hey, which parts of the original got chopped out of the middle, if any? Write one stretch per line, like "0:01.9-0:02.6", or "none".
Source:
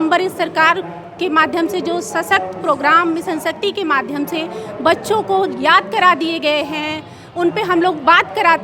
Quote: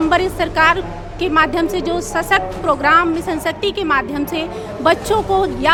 none